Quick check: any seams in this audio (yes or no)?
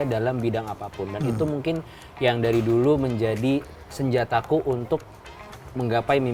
no